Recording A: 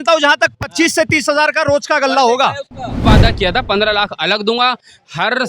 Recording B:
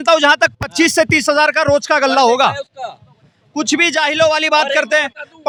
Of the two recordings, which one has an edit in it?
A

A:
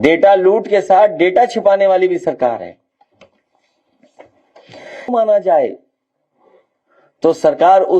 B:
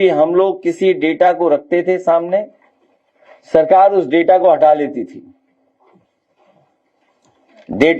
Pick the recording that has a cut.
A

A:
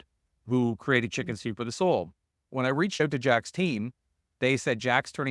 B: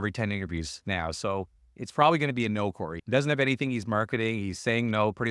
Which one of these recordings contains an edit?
A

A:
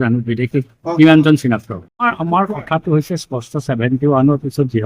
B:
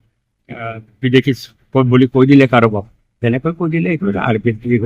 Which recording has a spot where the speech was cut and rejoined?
A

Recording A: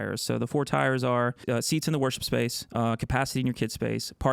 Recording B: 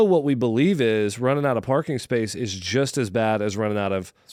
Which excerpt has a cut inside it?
A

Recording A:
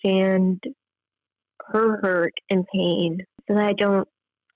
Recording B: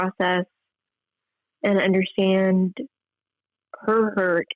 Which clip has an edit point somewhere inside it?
A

